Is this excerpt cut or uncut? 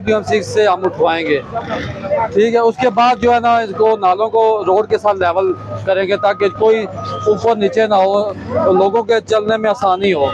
uncut